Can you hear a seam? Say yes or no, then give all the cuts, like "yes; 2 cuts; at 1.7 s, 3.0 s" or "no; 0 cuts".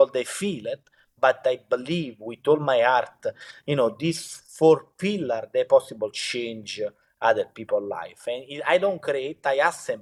no; 0 cuts